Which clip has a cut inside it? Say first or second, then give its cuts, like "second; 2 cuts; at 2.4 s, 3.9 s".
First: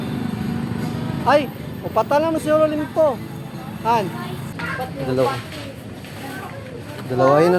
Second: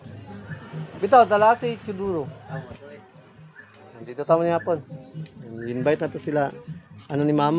first; 1 cut; at 4.5 s